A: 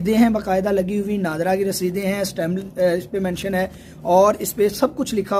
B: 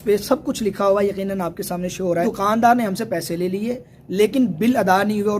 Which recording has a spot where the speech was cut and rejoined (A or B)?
B